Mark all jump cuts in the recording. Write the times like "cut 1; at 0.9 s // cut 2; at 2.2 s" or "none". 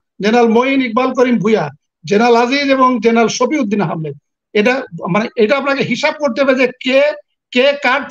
none

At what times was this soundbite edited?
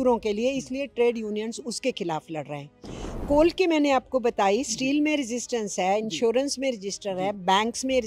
cut 1; at 3.2 s

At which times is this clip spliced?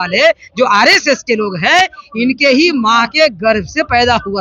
none

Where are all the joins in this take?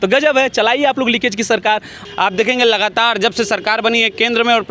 cut 1; at 1.9 s

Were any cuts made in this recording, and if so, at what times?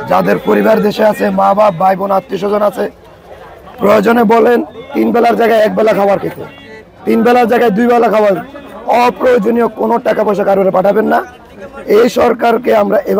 none

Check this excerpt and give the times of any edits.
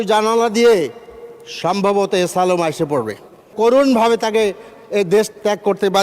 cut 1; at 3.5 s

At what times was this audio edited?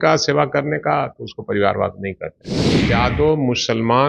cut 1; at 2.8 s

